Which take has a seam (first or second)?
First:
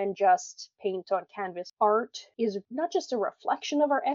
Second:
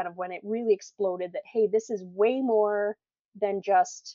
first